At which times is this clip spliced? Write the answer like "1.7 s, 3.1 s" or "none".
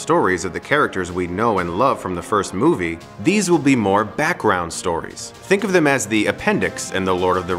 4.3 s